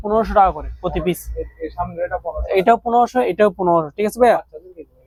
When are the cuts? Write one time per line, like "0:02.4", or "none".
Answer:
none